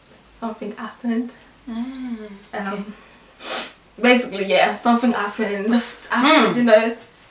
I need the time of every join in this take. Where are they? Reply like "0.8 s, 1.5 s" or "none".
5.7 s